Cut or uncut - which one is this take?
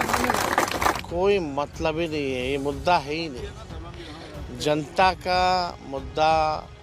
cut